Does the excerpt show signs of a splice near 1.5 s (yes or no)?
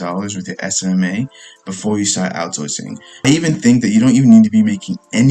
no